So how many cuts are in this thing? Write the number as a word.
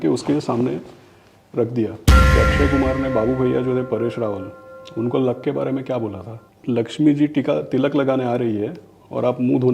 two